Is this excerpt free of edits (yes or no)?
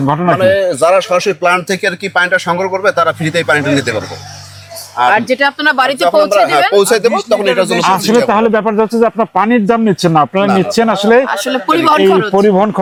yes